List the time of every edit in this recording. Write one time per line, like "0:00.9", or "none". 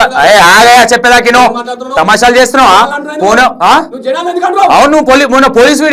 none